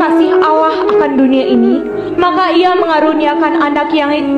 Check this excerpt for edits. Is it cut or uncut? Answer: uncut